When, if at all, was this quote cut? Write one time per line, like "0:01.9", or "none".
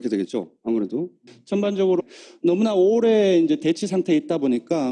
none